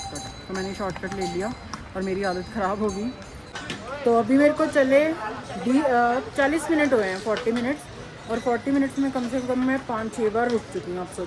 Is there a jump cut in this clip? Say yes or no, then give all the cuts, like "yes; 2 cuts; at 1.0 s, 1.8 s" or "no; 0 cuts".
yes; 1 cut; at 3.4 s